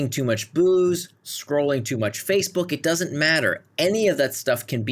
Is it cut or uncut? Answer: cut